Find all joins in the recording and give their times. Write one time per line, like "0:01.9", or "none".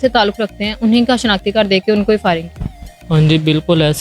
none

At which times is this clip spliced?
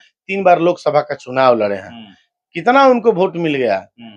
none

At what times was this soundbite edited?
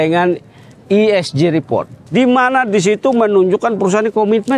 0:02.0

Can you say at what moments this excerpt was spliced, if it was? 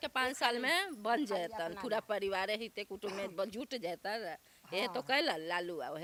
none

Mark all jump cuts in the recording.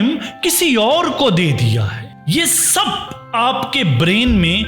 0:02.1

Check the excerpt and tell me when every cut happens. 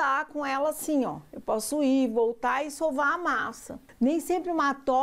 0:03.8

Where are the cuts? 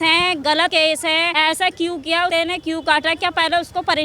0:00.8
0:02.3

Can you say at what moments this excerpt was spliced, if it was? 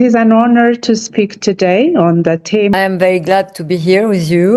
0:02.7

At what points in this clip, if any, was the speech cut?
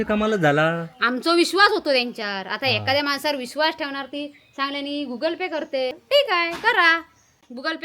0:06.0

